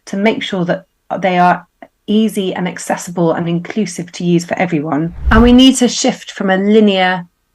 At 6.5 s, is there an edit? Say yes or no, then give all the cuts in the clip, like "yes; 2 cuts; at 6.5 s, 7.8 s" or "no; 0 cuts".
no; 1 cut; at 5.2 s